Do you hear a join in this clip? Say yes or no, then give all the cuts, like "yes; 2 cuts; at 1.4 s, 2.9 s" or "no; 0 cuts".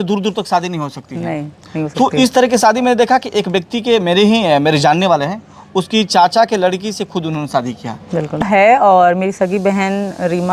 yes; 1 cut; at 8.4 s